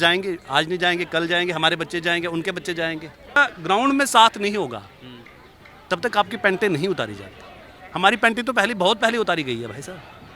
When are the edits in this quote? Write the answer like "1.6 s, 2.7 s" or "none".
3.4 s